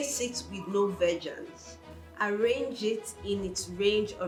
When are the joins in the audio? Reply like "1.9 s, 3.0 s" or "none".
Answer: none